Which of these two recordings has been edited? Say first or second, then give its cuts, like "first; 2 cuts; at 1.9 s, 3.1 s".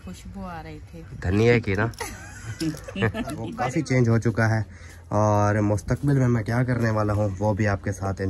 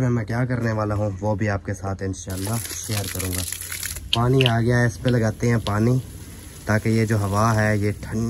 first; 1 cut; at 3.6 s